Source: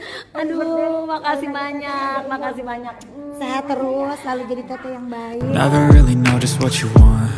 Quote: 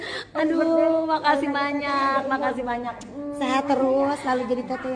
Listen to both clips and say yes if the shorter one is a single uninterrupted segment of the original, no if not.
yes